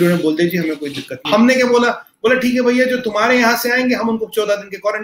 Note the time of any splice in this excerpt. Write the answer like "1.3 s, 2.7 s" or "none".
1.2 s